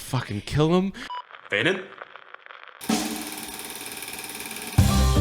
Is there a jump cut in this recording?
yes; 1 cut; at 1.0 s

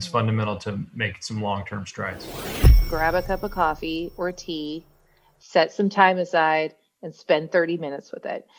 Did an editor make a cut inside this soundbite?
yes; 1 cut; at 2.6 s

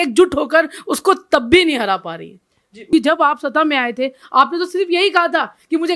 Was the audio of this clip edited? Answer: yes; 1 cut; at 2.9 s

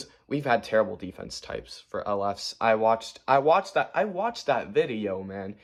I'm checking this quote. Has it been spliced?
no; 0 cuts

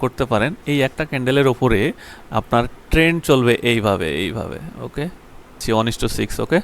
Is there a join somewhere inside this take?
yes; 1 cut; at 5.6 s

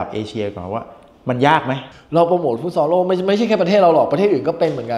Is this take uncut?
no; 1 cut; at 1.9 s

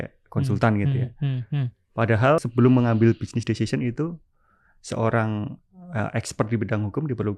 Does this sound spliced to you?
yes; 1 cut; at 2.4 s

